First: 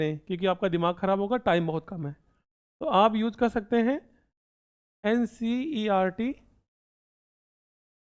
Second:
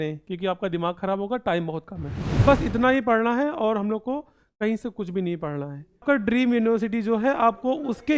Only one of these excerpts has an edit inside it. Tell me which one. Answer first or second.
second